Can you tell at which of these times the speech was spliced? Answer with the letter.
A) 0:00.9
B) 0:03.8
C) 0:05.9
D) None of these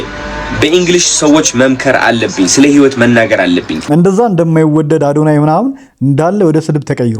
B